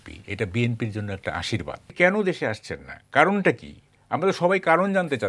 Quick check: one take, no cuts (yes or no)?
no